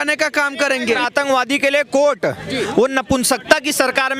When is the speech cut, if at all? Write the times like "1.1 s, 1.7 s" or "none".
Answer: 1.0 s